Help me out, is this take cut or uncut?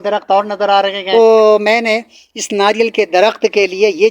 cut